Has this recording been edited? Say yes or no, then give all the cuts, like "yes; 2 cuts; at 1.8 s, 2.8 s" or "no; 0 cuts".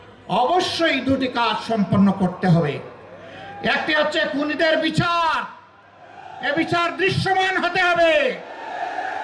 no; 0 cuts